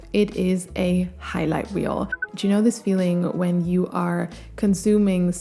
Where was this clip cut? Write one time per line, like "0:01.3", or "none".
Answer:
0:02.3

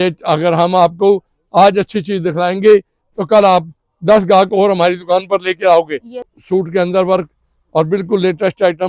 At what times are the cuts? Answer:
0:06.3

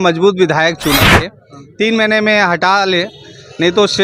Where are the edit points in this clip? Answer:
0:01.3

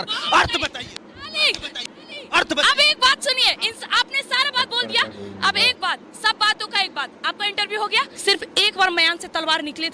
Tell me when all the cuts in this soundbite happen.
0:08.1

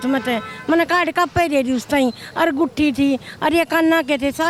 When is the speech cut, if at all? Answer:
none

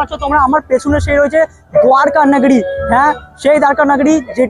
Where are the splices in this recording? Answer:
none

